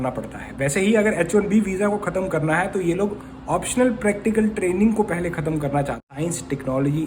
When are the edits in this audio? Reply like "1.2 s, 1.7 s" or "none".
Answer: 6.0 s